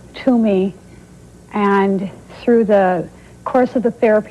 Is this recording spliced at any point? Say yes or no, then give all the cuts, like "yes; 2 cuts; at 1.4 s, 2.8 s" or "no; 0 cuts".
no; 0 cuts